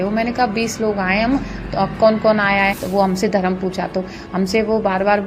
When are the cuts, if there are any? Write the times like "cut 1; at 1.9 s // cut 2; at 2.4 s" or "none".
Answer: cut 1; at 2.8 s